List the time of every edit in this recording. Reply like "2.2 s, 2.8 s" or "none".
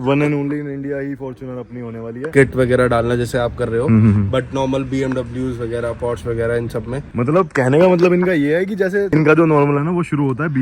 2.3 s